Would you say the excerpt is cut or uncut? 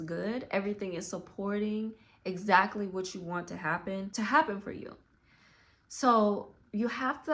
cut